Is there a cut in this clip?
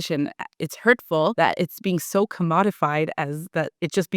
yes; 1 cut; at 1.3 s

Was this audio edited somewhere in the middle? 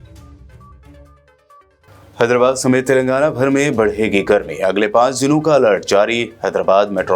yes; 1 cut; at 0.9 s

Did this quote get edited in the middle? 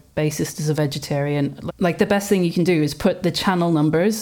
yes; 1 cut; at 1.6 s

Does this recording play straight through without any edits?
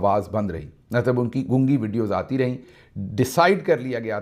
yes; 0 cuts

